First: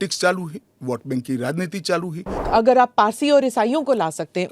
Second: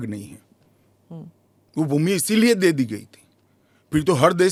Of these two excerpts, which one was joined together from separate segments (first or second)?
first